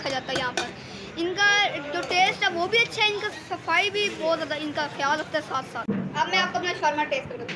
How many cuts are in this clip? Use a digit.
1